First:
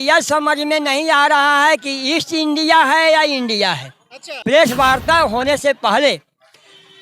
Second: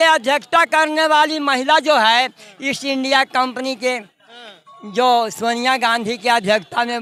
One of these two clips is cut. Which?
first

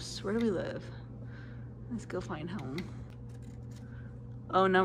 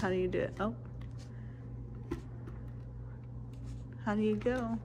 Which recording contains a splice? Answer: first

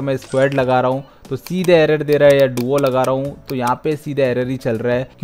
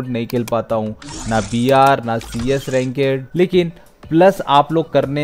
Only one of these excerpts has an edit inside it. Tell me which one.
second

